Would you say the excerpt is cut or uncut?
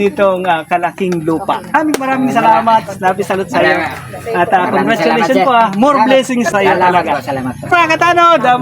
cut